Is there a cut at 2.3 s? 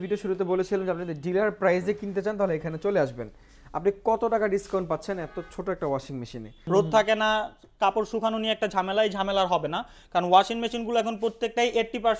no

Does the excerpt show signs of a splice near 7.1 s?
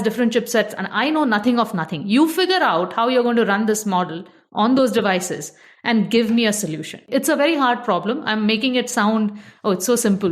yes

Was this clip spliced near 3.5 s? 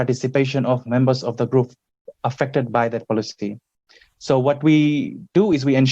no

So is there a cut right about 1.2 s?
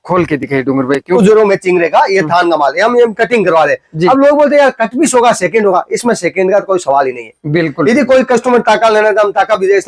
yes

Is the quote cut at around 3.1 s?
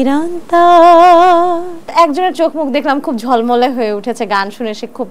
no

